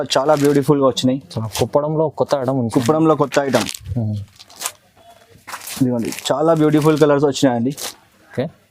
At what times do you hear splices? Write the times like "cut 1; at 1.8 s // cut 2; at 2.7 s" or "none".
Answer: none